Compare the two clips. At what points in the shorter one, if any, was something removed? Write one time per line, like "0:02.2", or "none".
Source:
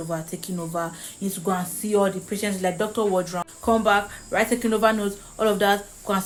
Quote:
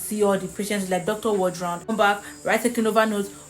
0:01.9